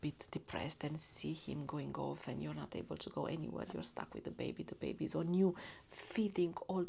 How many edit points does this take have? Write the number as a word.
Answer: zero